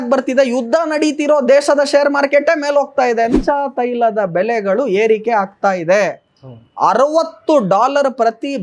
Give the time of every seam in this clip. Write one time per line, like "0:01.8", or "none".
0:03.3